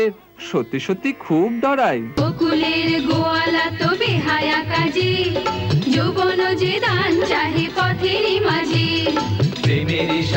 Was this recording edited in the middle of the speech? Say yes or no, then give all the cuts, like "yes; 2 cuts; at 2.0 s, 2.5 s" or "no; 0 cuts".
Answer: yes; 1 cut; at 2.2 s